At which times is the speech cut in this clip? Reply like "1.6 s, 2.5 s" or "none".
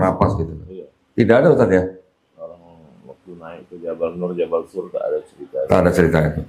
none